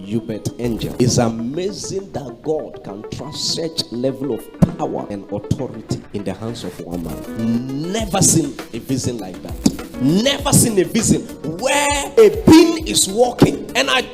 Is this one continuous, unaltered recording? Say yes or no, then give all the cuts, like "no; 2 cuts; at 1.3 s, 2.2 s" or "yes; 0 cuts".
no; 2 cuts; at 0.9 s, 7.2 s